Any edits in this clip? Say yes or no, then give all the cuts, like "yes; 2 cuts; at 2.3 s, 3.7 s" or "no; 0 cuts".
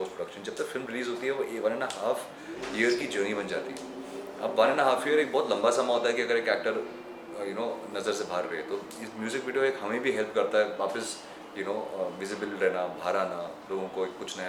no; 0 cuts